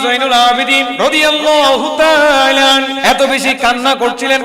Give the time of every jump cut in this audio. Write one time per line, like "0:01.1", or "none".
0:00.9
0:02.9